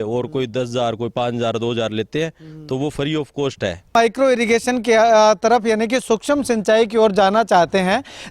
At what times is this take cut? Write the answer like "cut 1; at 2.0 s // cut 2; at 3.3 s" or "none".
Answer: cut 1; at 3.9 s

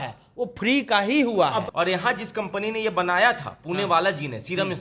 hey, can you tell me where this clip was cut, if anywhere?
cut 1; at 1.7 s

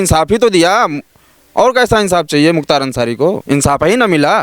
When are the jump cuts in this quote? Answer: cut 1; at 3.4 s

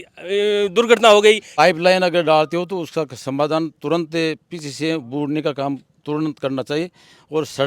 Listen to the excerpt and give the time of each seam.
cut 1; at 1.5 s

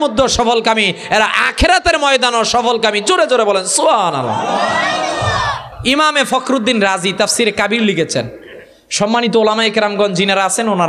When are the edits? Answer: cut 1; at 5.7 s

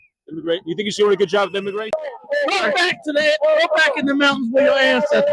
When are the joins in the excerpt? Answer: cut 1; at 1.9 s

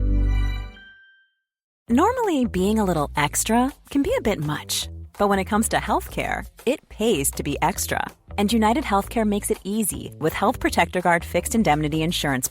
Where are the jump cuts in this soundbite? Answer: cut 1; at 1.7 s

